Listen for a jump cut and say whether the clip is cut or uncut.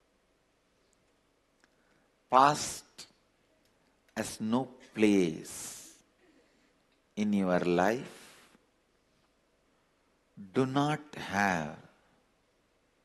uncut